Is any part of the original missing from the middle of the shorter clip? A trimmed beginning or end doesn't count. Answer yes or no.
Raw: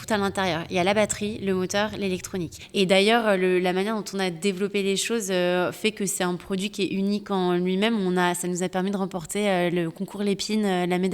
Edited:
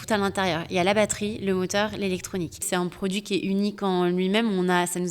yes